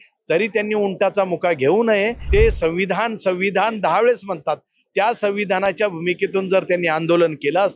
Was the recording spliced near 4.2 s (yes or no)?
no